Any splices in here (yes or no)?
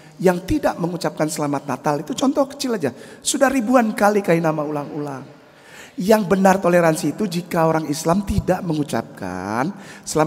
no